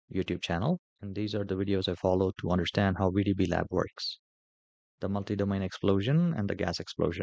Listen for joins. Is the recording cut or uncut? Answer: cut